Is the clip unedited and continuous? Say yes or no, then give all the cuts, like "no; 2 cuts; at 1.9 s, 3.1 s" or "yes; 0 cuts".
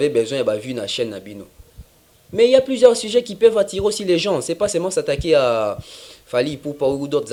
yes; 0 cuts